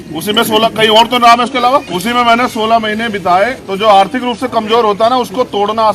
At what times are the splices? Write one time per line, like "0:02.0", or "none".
0:01.9
0:03.6